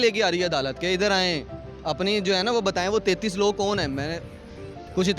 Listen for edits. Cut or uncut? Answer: uncut